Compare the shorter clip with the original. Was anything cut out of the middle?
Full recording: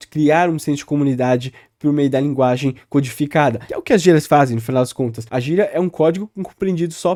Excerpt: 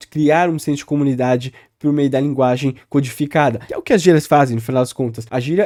no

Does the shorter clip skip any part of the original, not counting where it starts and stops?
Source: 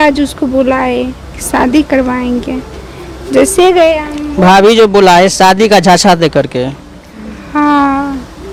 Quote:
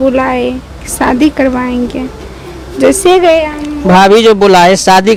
no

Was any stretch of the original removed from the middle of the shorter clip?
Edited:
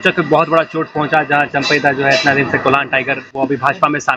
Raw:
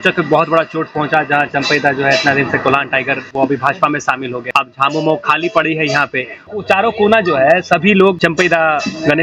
no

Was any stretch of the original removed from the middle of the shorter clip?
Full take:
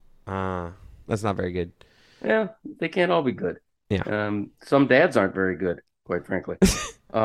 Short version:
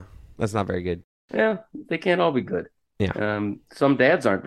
yes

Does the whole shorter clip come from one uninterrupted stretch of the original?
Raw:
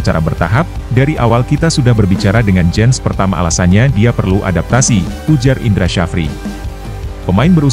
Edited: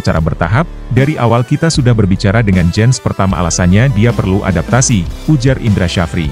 yes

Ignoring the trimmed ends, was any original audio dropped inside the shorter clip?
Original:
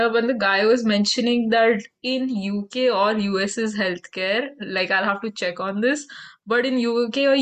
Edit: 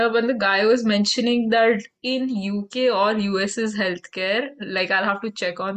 no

